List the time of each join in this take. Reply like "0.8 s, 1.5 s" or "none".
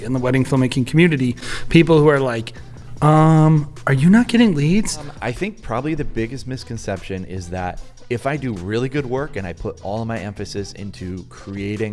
5.1 s

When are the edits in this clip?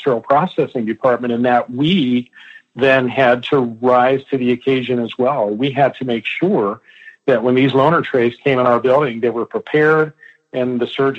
none

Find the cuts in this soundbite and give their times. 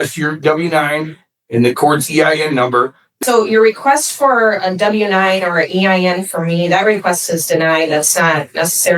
3.1 s

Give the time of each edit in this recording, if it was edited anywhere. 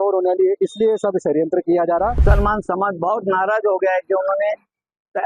2.2 s

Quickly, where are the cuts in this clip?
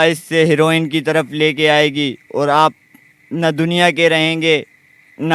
none

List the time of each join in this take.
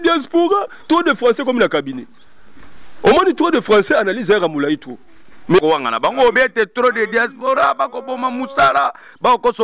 5.6 s

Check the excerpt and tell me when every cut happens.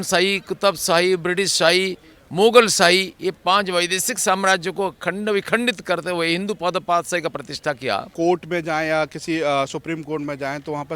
8.1 s

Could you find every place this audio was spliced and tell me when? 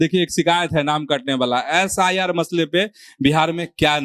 none

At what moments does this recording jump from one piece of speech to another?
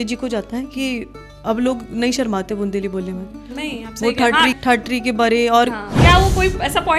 4.5 s, 5.9 s

